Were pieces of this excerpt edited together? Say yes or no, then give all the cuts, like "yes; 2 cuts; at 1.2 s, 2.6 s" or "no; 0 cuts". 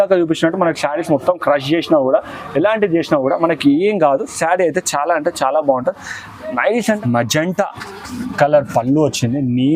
yes; 1 cut; at 7.0 s